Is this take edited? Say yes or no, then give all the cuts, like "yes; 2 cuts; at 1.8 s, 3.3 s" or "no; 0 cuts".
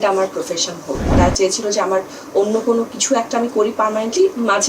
yes; 1 cut; at 1.1 s